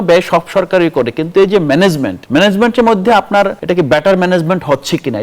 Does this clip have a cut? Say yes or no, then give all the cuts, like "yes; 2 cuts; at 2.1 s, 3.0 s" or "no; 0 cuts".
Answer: yes; 2 cuts; at 2.1 s, 3.6 s